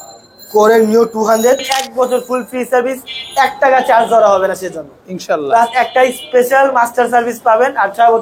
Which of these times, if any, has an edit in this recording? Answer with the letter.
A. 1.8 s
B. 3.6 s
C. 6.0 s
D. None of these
A